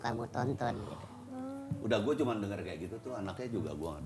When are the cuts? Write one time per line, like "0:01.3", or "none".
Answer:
none